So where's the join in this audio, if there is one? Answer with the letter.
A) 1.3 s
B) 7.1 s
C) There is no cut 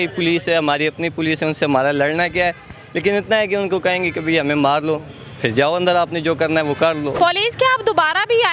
B